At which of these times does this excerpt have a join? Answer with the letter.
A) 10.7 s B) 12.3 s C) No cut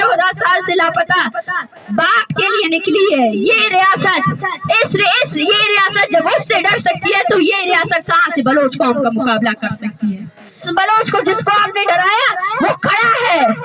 A